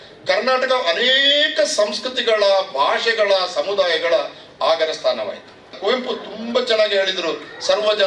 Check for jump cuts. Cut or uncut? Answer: cut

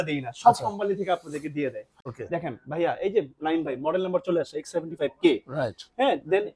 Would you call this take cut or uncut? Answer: cut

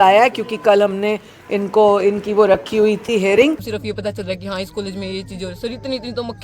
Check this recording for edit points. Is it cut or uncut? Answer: cut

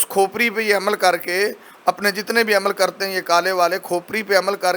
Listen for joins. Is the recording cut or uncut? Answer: uncut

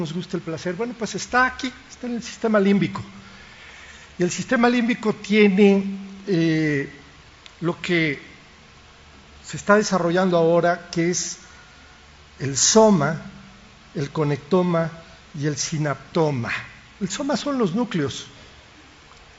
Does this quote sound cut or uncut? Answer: uncut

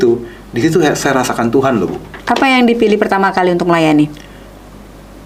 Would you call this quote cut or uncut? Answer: uncut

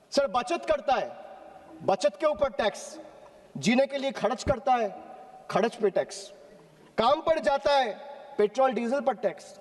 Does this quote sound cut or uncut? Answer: uncut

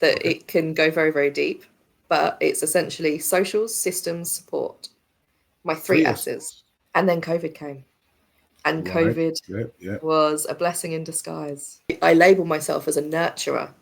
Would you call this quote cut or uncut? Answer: cut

